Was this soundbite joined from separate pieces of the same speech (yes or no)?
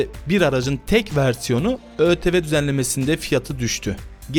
no